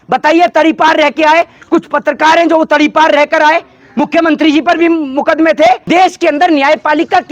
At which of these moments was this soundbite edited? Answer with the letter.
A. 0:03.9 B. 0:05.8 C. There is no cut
B